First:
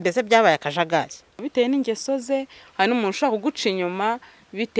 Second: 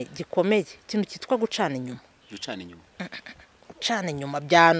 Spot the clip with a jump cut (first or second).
first